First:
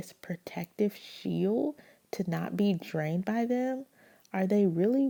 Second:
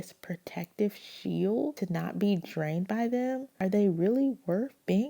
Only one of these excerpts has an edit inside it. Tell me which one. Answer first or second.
second